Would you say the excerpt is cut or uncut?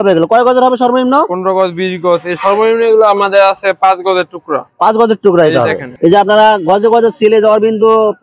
cut